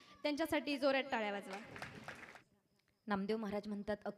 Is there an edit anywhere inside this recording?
yes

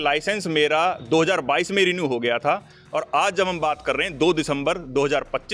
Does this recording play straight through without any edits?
yes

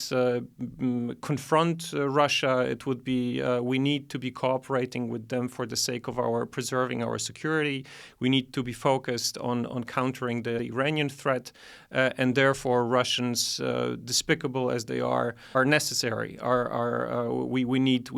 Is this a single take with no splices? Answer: yes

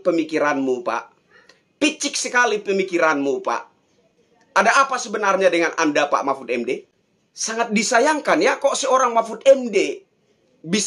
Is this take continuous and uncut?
yes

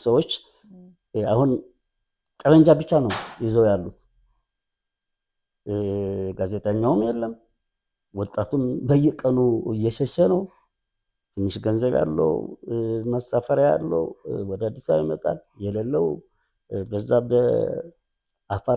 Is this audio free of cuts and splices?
yes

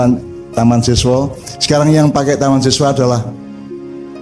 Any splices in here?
yes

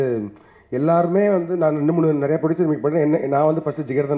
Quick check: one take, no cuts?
yes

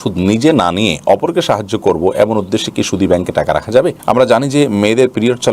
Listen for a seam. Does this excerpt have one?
yes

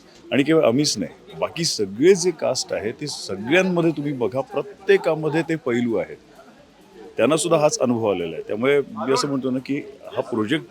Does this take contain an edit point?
no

